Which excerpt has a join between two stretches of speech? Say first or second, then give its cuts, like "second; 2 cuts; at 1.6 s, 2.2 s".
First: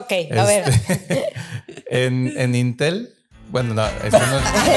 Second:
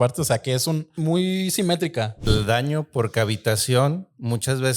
second; 2 cuts; at 0.9 s, 2.3 s